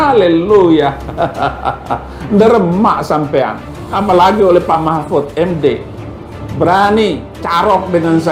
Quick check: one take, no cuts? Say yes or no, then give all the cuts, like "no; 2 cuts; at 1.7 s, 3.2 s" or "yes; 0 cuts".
yes; 0 cuts